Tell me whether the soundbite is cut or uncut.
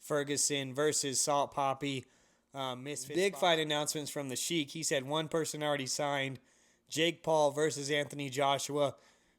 cut